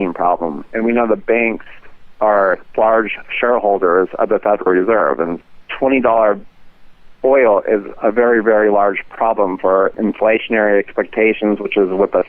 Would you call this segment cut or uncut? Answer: cut